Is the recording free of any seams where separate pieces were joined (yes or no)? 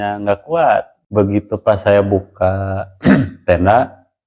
no